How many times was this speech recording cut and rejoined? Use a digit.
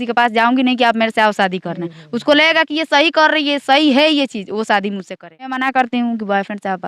1